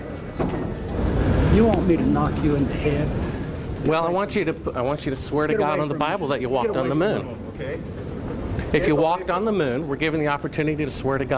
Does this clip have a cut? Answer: yes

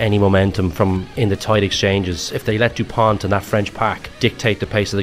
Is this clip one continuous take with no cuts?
no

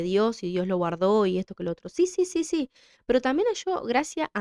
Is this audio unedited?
yes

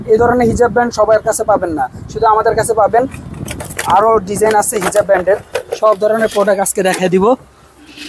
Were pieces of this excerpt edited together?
no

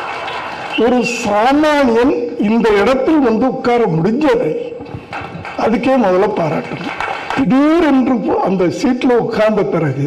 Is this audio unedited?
no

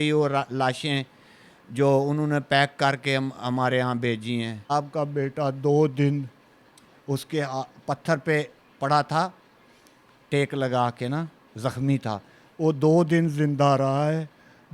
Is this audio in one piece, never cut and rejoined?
no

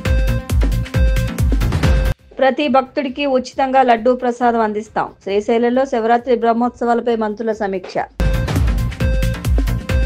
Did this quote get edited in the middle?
yes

